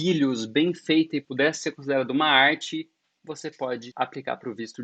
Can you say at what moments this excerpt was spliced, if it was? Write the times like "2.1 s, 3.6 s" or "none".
1.2 s, 3.9 s